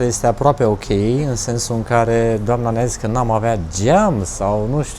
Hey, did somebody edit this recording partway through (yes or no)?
no